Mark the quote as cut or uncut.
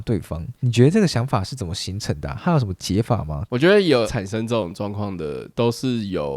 cut